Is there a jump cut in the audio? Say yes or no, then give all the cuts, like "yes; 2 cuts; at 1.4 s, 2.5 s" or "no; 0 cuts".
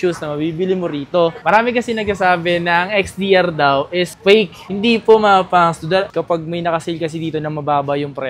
yes; 2 cuts; at 1.4 s, 6.1 s